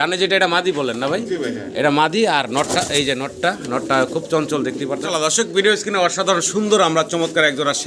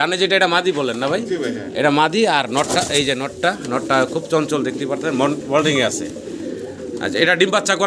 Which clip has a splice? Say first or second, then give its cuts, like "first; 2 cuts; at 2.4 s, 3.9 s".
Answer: first; 1 cut; at 5.0 s